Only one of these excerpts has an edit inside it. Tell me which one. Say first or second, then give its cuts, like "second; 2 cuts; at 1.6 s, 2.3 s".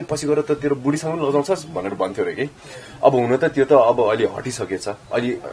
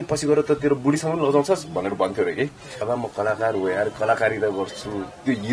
second; 1 cut; at 2.8 s